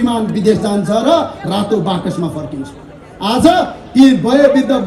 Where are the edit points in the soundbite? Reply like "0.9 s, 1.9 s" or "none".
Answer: none